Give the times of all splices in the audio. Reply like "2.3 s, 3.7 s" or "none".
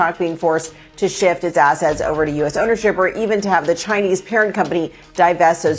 none